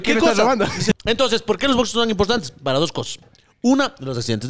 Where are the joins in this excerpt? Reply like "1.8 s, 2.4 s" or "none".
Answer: 1.0 s